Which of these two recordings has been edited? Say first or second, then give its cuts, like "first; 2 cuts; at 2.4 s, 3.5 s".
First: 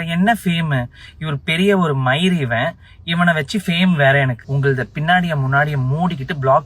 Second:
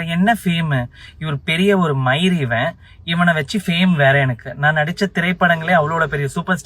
first; 1 cut; at 4.4 s